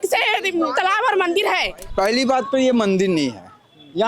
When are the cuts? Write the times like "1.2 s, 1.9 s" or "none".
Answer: 1.8 s